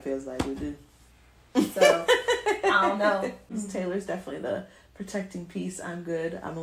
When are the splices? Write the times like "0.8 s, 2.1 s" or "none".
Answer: 3.5 s